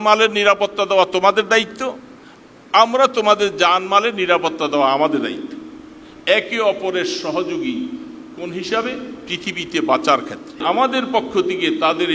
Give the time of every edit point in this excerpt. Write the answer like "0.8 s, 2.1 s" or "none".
10.6 s